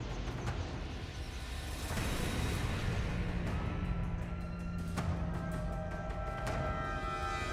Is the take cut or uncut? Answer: uncut